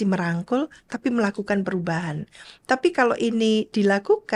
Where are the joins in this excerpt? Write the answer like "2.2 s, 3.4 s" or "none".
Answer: none